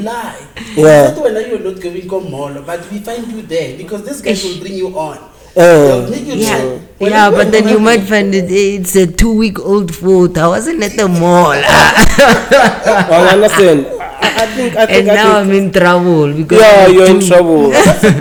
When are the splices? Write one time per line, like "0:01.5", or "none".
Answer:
none

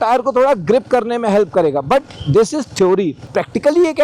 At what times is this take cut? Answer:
0:03.2

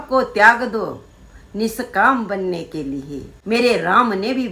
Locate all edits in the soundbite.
0:03.3

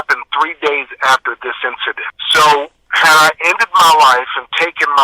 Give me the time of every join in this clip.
none

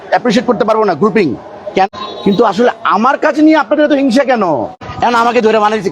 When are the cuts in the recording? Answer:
0:01.9
0:04.8

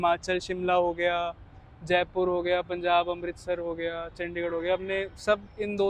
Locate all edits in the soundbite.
none

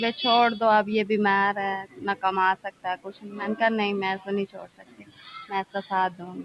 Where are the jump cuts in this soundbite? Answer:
none

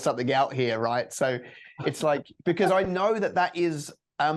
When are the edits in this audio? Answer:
none

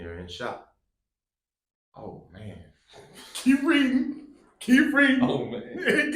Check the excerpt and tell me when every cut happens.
none

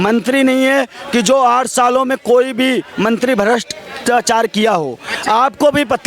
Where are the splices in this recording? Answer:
none

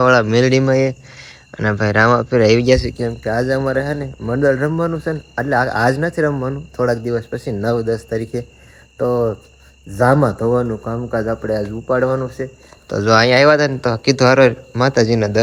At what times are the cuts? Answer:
none

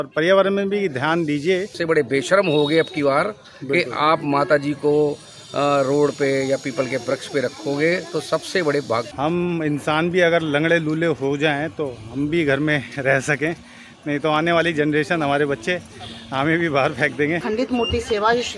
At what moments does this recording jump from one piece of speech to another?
0:01.8
0:09.1
0:17.4

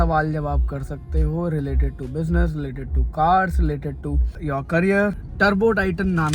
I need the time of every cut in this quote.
0:04.4
0:05.2

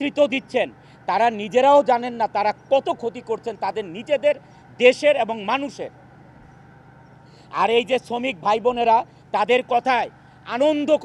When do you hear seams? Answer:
none

